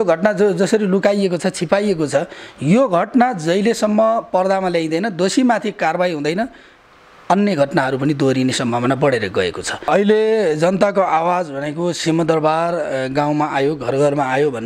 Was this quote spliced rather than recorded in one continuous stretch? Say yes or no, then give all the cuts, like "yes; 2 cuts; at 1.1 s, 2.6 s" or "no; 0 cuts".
yes; 1 cut; at 9.9 s